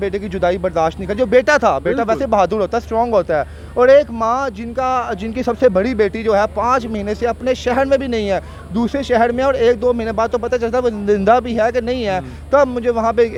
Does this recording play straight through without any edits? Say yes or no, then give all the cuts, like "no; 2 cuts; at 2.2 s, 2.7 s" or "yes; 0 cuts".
yes; 0 cuts